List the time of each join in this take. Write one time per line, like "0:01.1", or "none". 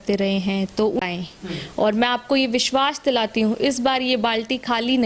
0:01.0